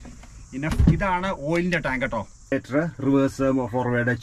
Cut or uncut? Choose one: cut